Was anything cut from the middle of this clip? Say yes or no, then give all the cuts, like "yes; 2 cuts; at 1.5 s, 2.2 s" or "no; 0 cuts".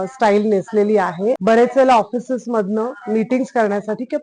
yes; 1 cut; at 1.4 s